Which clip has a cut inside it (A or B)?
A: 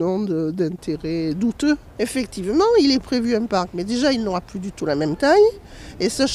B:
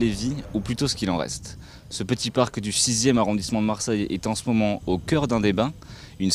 B